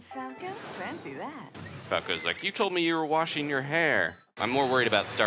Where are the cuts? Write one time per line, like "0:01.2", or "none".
0:04.3